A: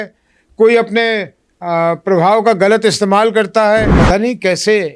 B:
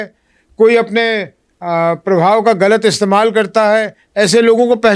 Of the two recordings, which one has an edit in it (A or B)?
A